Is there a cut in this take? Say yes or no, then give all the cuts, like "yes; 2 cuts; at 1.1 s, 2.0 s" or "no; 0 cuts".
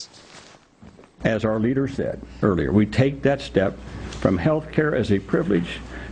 yes; 1 cut; at 2.9 s